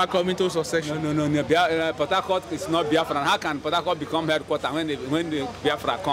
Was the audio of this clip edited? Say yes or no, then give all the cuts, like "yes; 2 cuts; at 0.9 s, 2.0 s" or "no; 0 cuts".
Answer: no; 0 cuts